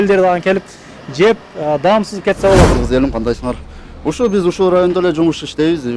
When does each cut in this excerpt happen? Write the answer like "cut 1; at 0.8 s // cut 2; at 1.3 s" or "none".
cut 1; at 2.7 s